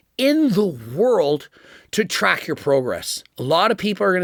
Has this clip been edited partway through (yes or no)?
no